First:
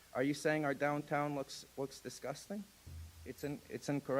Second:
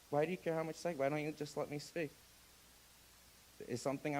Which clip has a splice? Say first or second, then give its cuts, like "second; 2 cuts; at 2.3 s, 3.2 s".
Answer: first; 1 cut; at 3.1 s